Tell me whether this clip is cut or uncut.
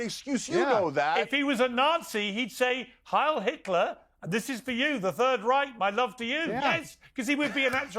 cut